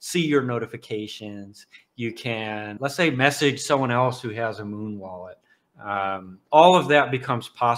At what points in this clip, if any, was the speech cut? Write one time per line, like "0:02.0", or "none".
0:02.8